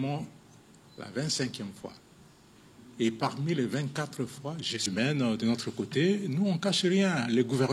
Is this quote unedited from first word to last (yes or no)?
no